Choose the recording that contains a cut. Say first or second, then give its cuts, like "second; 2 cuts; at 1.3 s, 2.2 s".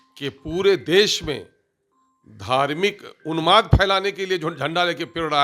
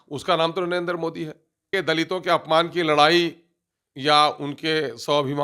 second; 1 cut; at 1.7 s